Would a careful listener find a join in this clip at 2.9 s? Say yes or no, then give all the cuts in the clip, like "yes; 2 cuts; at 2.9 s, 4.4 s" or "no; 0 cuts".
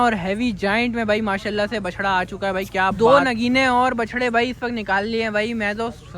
yes; 1 cut; at 2.9 s